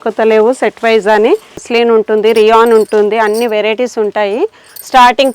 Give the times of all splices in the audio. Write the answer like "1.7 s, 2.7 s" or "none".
1.6 s